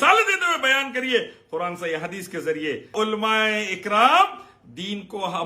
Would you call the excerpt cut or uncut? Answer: cut